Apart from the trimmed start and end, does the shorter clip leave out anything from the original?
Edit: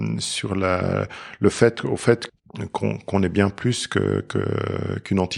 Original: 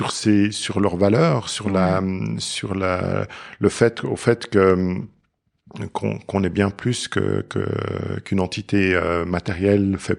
yes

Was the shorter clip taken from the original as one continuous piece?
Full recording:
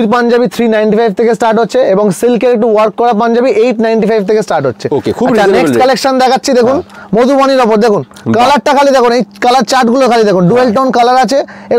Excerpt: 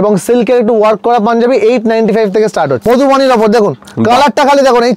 no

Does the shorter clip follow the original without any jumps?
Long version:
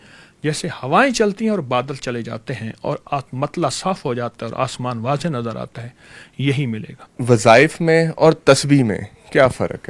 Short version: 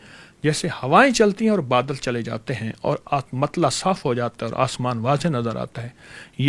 yes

